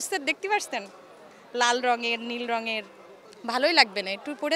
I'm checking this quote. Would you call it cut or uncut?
uncut